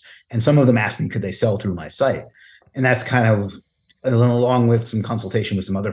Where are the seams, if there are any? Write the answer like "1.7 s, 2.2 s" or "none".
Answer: none